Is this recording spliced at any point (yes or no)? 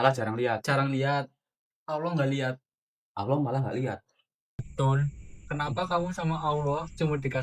yes